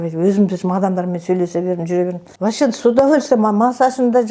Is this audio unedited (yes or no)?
no